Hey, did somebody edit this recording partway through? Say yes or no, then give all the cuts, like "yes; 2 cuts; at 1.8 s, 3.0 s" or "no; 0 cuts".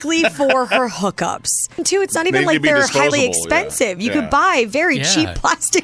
yes; 1 cut; at 1.8 s